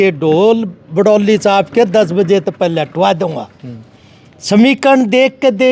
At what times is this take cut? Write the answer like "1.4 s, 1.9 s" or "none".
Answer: none